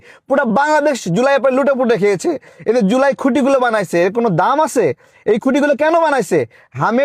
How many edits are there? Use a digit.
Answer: 0